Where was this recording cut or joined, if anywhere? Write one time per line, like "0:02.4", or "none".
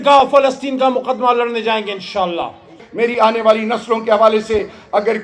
0:02.7